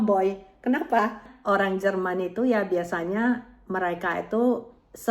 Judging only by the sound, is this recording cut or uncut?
cut